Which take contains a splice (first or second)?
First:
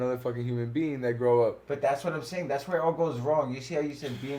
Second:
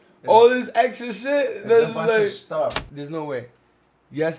second